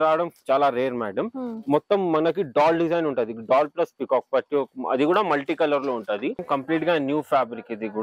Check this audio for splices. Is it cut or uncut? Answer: cut